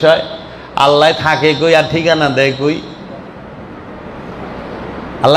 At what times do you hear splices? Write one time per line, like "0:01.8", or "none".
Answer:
none